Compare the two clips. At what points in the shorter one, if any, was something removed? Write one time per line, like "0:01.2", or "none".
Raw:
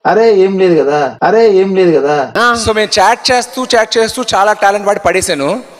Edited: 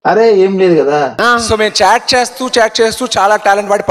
0:01.0

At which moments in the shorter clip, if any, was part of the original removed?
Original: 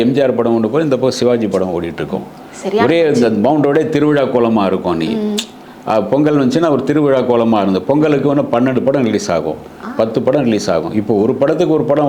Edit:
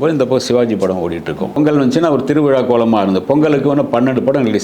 0:01.6

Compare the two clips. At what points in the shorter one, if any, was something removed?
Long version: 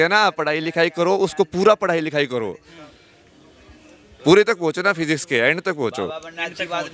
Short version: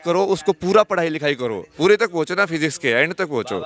0:01.7

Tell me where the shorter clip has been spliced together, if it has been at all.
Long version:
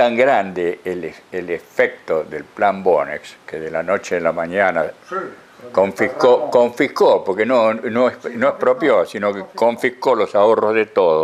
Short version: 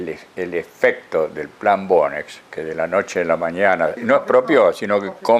0:04.0

